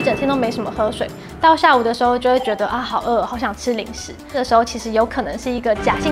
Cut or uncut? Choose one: cut